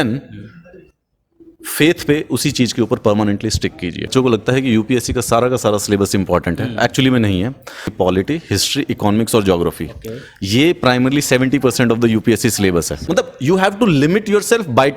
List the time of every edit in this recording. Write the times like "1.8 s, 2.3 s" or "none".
4.1 s, 7.9 s, 13.0 s